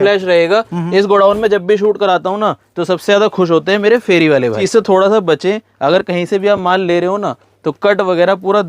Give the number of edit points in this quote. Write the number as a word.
one